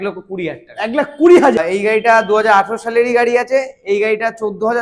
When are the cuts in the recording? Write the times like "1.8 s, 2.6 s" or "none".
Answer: 1.6 s